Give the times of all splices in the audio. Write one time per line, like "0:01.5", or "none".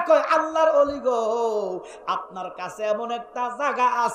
none